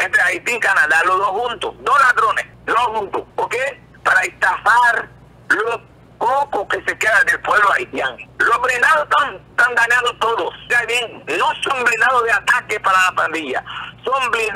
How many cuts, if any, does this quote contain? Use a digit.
4